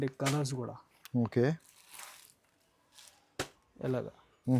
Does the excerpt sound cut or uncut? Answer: uncut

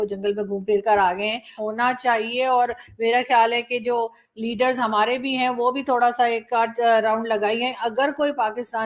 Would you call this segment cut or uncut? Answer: cut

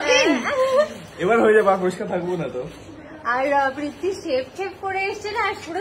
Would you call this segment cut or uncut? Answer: uncut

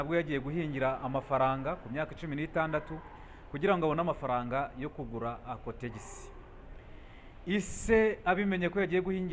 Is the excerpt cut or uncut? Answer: uncut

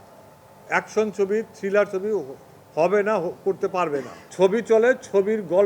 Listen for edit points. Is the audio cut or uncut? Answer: cut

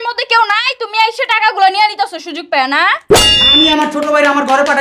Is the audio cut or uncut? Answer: cut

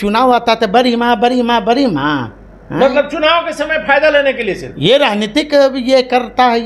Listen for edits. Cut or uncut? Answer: uncut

